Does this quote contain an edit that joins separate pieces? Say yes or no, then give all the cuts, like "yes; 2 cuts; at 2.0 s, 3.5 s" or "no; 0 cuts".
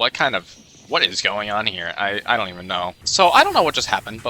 yes; 1 cut; at 3.0 s